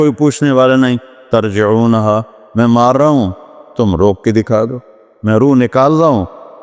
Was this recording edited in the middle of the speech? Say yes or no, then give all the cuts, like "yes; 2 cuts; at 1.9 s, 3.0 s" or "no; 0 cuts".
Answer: no; 0 cuts